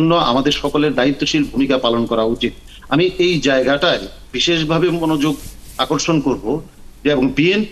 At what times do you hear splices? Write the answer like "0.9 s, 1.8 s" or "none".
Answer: none